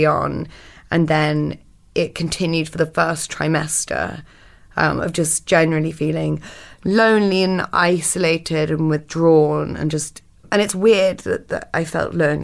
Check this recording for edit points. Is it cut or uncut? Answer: cut